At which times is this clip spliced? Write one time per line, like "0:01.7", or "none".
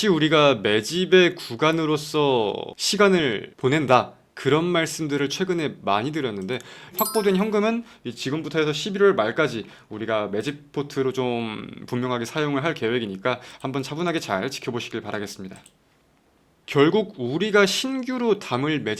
0:07.0
0:16.1